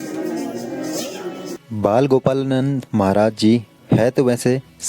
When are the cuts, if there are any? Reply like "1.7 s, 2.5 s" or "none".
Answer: 1.5 s